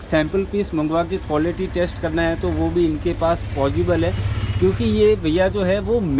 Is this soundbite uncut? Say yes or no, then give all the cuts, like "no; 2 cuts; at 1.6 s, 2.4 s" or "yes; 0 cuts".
yes; 0 cuts